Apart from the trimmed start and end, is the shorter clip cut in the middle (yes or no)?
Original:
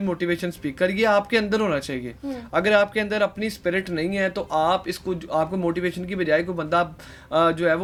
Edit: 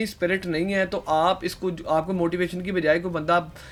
no